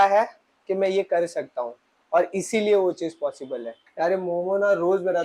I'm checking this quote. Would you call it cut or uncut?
uncut